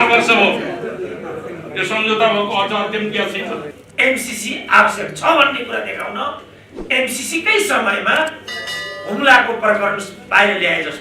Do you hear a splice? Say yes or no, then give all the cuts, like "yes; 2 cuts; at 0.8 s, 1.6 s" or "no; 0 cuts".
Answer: yes; 1 cut; at 3.8 s